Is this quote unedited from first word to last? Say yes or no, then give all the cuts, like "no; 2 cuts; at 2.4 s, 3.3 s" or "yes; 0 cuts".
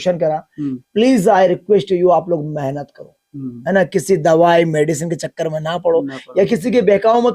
yes; 0 cuts